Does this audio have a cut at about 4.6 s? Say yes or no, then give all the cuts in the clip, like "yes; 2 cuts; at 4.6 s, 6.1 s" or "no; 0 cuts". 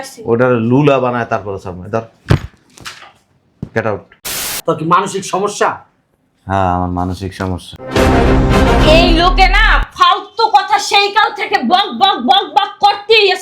yes; 1 cut; at 4.6 s